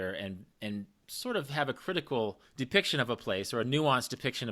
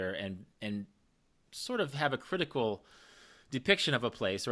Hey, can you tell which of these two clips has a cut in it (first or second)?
first